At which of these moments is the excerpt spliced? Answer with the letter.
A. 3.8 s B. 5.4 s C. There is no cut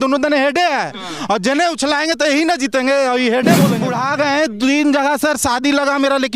A